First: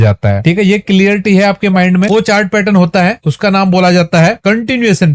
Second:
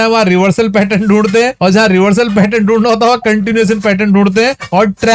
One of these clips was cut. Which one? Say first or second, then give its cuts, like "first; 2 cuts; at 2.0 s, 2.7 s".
first; 1 cut; at 2.1 s